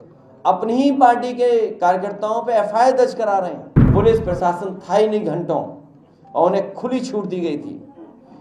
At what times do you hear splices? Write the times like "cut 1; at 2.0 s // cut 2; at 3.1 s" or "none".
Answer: cut 1; at 3.9 s